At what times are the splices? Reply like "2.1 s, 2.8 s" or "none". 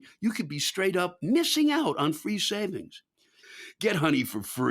3.4 s